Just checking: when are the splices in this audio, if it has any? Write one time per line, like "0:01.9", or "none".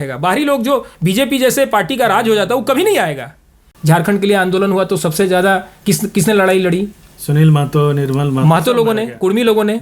0:03.7